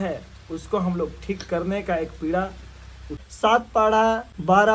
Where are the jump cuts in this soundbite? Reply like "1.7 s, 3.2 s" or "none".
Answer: 3.1 s